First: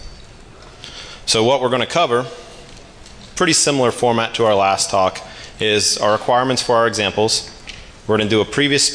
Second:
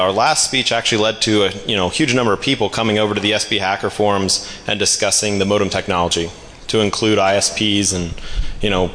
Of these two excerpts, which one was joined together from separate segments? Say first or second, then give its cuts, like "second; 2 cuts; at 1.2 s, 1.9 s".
first; 1 cut; at 8.1 s